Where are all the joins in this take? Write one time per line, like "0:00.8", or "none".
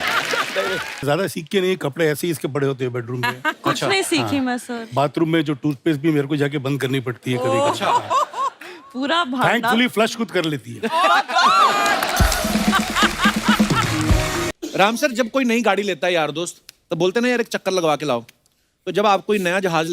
0:01.0
0:14.5